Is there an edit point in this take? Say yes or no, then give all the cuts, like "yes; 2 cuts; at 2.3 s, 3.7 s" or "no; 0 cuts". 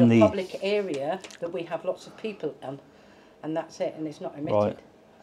no; 0 cuts